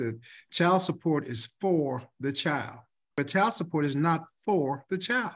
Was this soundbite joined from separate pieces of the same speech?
no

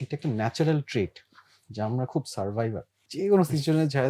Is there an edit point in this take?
yes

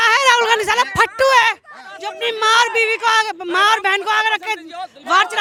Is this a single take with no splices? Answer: yes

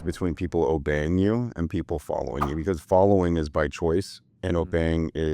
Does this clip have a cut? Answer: no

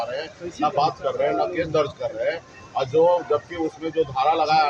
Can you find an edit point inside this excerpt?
no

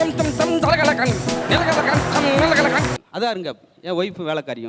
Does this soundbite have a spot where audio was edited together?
yes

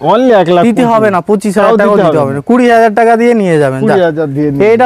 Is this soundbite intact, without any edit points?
yes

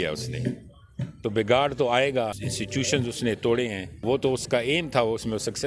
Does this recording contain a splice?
yes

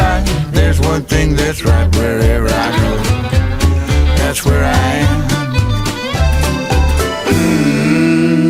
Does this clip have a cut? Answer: no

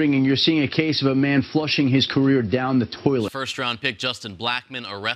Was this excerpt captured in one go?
no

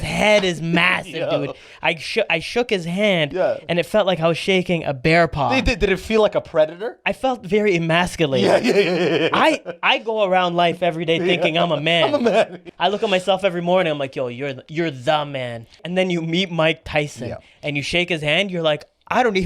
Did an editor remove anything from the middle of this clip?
yes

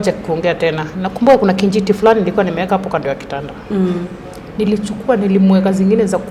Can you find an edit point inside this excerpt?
no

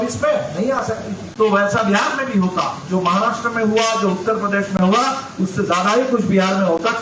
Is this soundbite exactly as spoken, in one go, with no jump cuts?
no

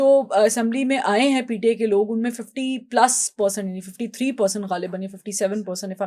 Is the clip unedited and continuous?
yes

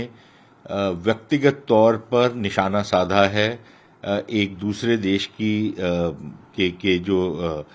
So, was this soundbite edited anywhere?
no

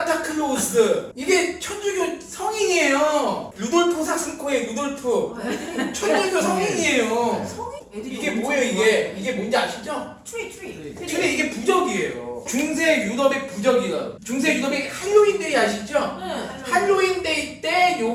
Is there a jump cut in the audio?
yes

